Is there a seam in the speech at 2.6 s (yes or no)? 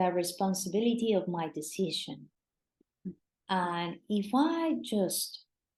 no